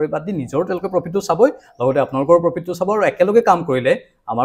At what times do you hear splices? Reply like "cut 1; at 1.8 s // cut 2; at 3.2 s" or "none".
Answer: none